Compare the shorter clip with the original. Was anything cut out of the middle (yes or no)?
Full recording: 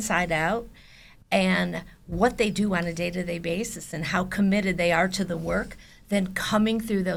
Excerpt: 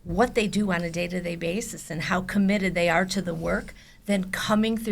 no